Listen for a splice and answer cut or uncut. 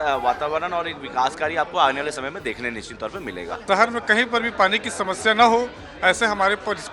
cut